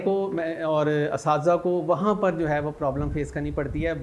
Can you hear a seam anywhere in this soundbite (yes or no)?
no